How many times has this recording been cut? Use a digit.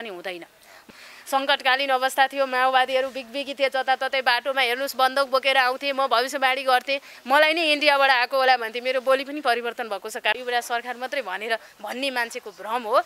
2